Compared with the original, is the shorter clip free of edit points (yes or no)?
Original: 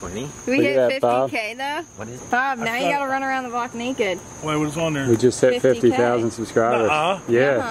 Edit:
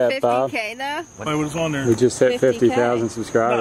no